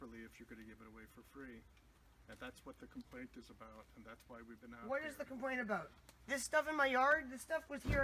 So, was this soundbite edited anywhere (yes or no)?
no